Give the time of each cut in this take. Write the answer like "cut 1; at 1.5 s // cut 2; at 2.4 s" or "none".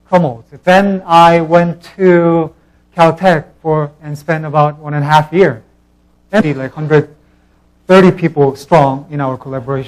none